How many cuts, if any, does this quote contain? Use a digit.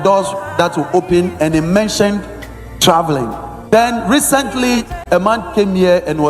1